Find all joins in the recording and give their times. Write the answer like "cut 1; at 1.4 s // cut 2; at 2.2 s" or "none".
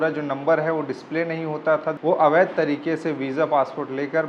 cut 1; at 1.9 s